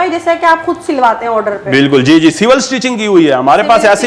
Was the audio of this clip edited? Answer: no; 0 cuts

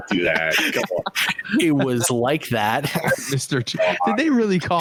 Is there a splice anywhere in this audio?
no; 0 cuts

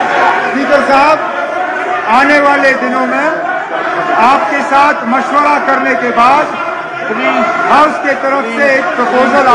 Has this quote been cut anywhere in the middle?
no; 0 cuts

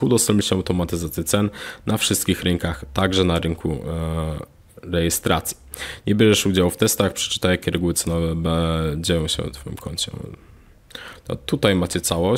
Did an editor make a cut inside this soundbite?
no; 0 cuts

